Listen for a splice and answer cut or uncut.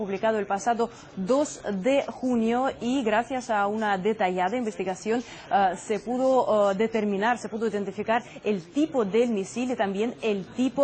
uncut